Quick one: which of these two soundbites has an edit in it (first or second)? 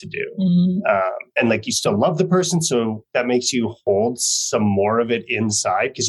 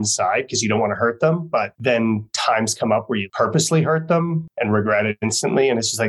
second